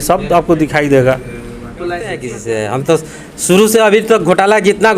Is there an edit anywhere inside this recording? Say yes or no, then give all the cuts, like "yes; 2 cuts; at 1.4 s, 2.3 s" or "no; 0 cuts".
yes; 1 cut; at 2.3 s